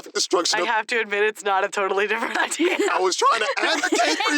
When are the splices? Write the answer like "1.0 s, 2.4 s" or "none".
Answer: 0.7 s, 2.7 s